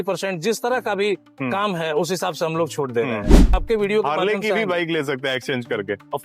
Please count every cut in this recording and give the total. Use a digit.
1